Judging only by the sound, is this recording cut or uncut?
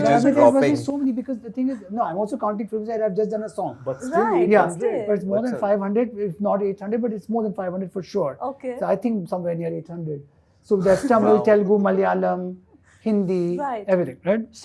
uncut